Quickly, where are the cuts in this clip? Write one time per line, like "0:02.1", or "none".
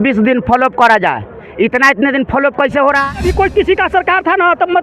0:03.1